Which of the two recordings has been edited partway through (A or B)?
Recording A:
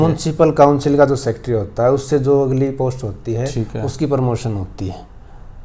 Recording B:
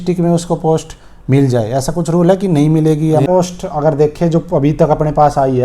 B